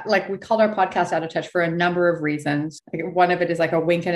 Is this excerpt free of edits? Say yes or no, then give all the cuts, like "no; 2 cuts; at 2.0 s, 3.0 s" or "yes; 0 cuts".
no; 1 cut; at 2.8 s